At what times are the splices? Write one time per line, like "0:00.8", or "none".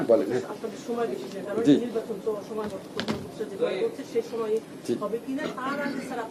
none